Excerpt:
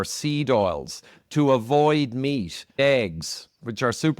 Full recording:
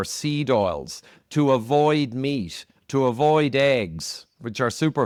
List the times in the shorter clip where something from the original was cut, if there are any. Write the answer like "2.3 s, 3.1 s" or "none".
2.8 s

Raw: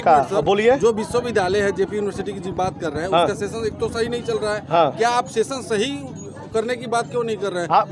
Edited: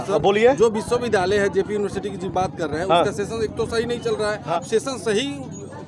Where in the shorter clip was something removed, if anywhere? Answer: 4.5 s

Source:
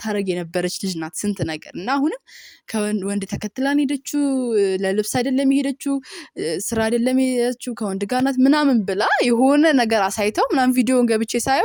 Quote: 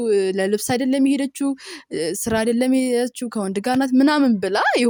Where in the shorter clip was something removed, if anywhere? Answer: none

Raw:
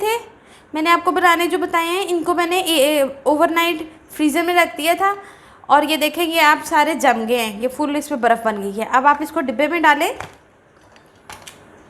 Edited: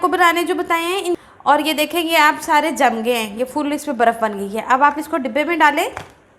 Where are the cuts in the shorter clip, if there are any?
1.2 s

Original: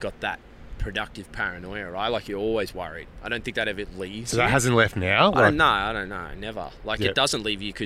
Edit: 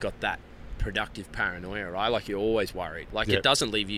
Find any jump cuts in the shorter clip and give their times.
3.0 s

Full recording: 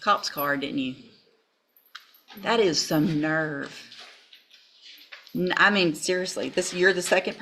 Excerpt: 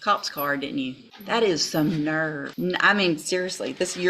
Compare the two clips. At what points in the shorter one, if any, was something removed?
1.1 s, 2.5 s

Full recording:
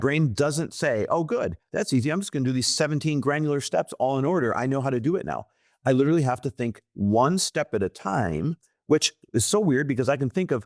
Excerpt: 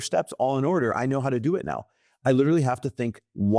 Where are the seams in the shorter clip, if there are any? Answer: none

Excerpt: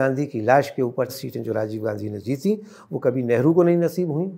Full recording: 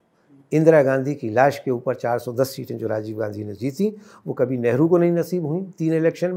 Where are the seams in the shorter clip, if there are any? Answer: 1.1 s

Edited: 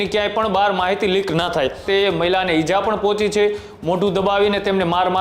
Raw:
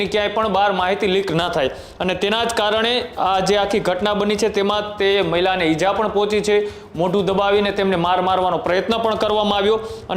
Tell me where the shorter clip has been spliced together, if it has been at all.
1.8 s

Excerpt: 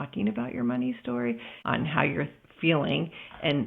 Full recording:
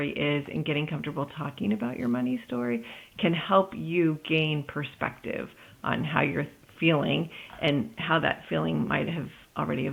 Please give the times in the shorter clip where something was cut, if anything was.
1.5 s

